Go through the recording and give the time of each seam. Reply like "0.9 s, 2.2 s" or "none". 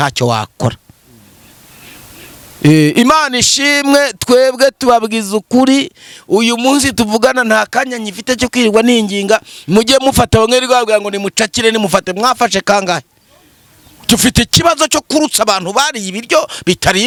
none